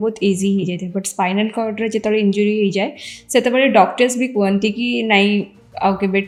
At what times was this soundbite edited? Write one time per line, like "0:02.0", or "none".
none